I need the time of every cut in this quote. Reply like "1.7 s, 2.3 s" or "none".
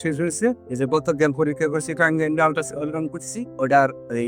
none